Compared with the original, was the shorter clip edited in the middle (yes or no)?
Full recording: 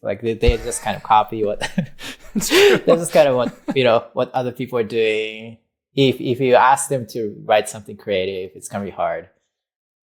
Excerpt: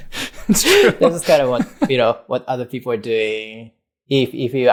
no